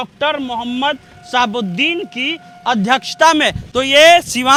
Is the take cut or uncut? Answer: uncut